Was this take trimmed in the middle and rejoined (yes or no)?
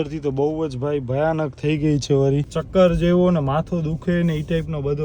yes